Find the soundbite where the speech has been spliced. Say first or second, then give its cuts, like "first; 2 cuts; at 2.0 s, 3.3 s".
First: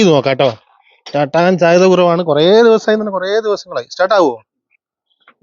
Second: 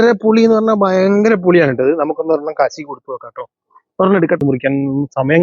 second; 1 cut; at 4.4 s